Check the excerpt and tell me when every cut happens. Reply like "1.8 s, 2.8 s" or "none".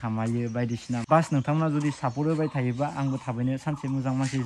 1.0 s